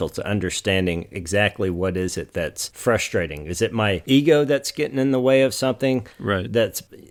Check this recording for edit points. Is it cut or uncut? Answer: uncut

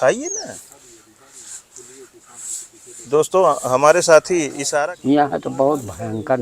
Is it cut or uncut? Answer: cut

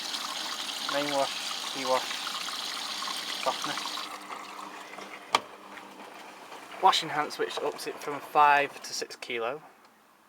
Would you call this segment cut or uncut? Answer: cut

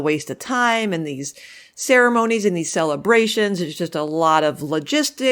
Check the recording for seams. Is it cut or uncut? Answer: uncut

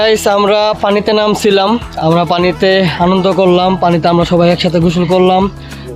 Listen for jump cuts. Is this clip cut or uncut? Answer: uncut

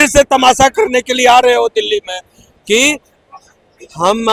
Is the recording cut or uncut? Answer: uncut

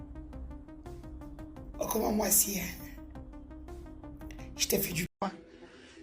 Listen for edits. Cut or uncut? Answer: cut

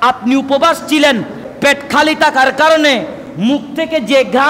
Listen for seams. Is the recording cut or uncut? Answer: cut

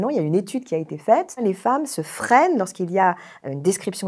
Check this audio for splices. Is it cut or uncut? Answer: cut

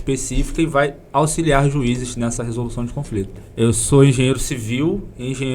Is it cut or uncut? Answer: cut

